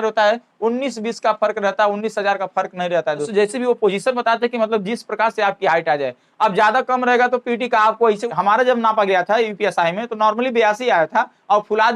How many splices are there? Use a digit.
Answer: 2